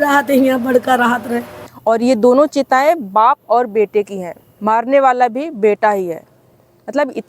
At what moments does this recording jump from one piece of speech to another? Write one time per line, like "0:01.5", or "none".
0:01.7